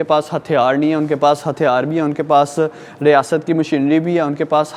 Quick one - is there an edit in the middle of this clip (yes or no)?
no